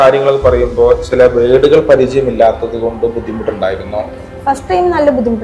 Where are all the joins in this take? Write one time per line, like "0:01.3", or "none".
none